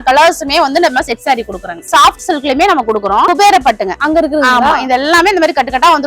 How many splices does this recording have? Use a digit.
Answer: 2